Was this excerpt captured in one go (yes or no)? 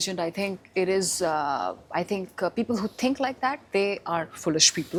yes